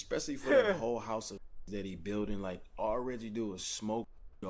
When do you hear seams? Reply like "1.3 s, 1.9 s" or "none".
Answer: none